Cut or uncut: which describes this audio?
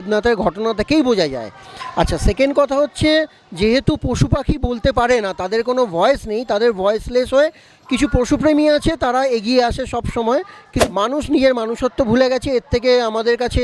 cut